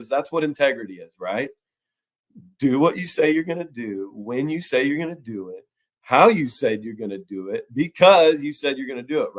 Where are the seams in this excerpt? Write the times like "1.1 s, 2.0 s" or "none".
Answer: none